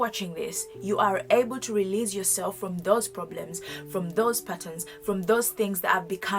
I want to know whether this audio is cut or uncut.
uncut